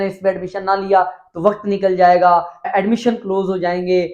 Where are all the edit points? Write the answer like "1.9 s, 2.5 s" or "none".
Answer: 2.7 s